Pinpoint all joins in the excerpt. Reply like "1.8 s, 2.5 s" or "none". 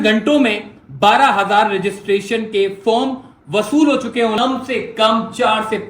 4.4 s